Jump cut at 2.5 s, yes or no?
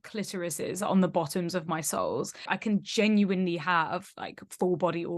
yes